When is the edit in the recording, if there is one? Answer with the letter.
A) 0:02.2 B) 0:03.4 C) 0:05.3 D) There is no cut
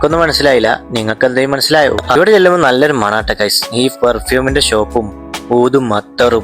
A